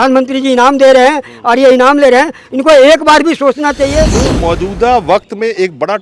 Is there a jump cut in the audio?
yes; 1 cut; at 4.1 s

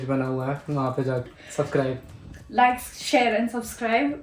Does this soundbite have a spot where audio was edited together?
yes; 1 cut; at 1.3 s

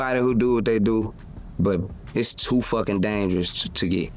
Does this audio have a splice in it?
no; 0 cuts

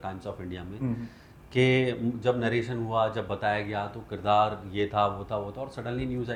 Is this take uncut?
yes; 0 cuts

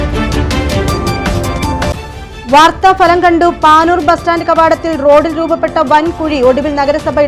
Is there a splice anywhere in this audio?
no; 0 cuts

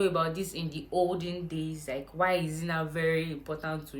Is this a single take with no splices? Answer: yes; 0 cuts

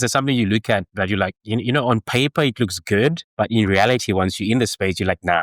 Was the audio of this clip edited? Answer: yes; 1 cut; at 3.2 s

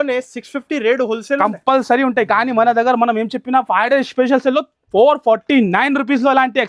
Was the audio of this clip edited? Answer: no; 0 cuts

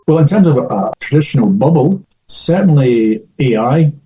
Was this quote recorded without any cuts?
no; 1 cut; at 1.0 s

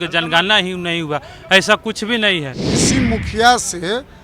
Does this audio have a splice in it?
yes; 1 cut; at 2.7 s

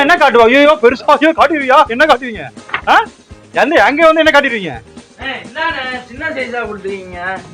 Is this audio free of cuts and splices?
yes; 0 cuts

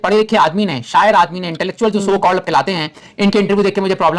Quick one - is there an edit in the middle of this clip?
no; 0 cuts

